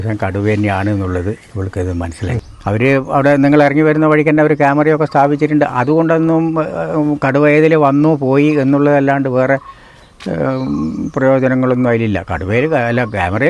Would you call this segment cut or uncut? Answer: cut